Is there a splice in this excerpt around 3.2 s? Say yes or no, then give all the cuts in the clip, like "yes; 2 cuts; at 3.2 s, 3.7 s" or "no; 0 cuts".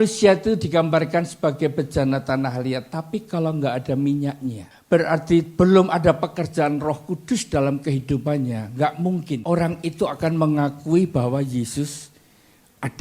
no; 2 cuts; at 4.7 s, 9.4 s